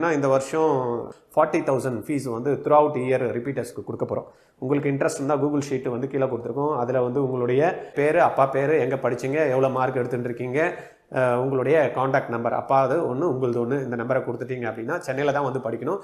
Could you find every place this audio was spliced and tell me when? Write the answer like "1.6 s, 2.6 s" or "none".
1.1 s, 7.9 s